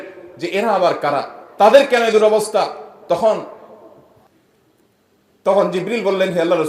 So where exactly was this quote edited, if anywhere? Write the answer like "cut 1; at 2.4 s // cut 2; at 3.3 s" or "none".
cut 1; at 4.3 s